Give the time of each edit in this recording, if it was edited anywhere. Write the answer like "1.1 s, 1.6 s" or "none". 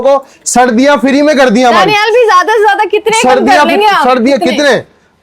none